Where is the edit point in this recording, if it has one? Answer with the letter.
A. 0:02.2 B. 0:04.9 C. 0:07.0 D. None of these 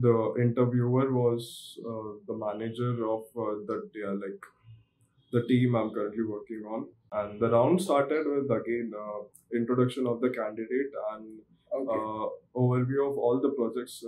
C